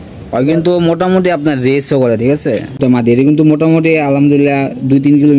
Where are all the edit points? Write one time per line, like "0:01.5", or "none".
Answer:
0:02.8